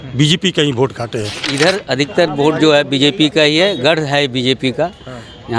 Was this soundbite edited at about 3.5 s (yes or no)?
no